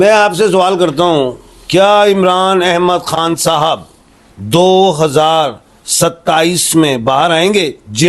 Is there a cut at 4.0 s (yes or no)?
no